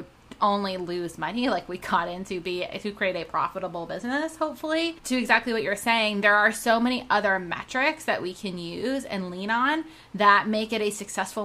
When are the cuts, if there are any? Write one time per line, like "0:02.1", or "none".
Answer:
0:05.0